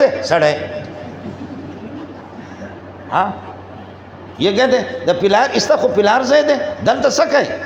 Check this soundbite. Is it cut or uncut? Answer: uncut